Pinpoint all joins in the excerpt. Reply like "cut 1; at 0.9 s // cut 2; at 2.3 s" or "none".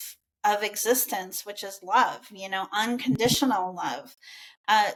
none

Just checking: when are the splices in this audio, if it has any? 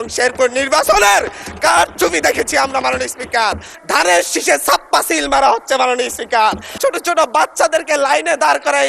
cut 1; at 3.7 s // cut 2; at 6.8 s

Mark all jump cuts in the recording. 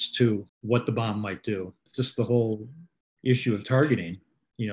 none

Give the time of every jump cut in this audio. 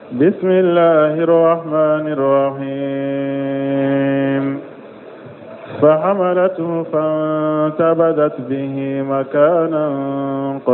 cut 1; at 0.9 s

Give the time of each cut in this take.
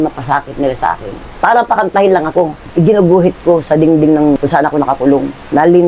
cut 1; at 1.3 s // cut 2; at 2.6 s

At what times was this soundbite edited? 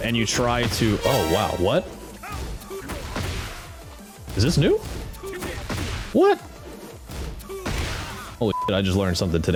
none

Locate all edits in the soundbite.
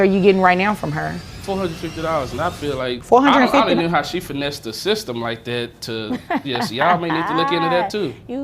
cut 1; at 1.3 s // cut 2; at 3.0 s

